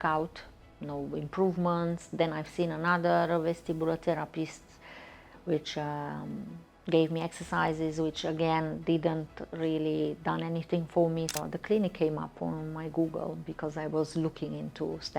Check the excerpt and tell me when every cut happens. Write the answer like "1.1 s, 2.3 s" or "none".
11.3 s